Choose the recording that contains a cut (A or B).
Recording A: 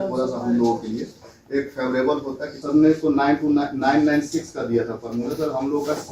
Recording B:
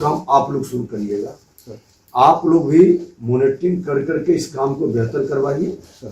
A